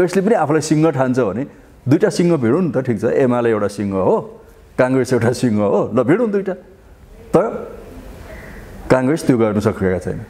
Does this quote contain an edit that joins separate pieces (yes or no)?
no